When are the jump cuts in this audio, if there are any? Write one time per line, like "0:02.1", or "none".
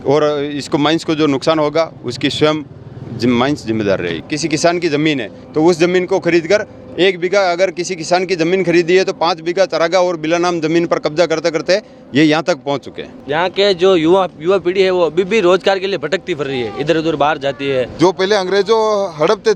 0:04.2
0:13.2
0:17.9